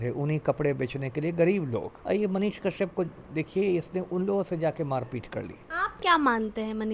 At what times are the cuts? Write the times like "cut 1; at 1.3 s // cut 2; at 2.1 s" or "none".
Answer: cut 1; at 1.9 s // cut 2; at 5.7 s